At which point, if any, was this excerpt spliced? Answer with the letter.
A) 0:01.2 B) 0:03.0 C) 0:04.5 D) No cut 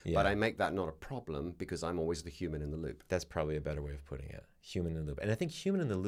D